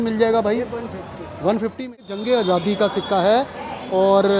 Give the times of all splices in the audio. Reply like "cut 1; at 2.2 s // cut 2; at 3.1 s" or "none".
cut 1; at 2.0 s